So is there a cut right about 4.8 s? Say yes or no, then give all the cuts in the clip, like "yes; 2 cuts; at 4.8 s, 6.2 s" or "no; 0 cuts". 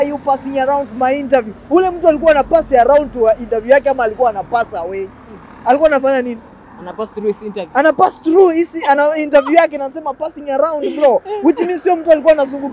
no; 0 cuts